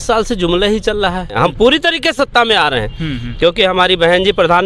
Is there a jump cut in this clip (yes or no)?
yes